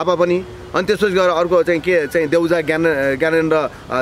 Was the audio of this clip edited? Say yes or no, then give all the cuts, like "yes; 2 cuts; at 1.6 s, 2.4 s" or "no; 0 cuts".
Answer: no; 0 cuts